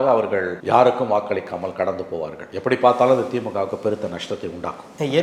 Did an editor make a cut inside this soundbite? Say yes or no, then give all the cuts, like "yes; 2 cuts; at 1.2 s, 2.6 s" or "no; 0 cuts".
no; 0 cuts